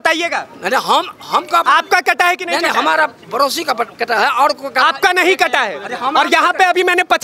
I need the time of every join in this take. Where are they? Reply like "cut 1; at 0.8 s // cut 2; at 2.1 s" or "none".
none